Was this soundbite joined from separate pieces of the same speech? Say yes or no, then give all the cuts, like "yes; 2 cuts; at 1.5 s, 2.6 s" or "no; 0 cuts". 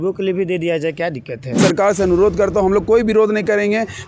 yes; 1 cut; at 1.6 s